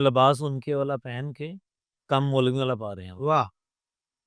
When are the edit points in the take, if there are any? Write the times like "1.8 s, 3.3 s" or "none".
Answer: none